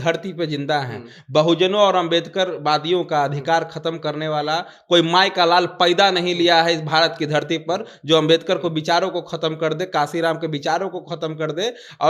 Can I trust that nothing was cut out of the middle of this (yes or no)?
yes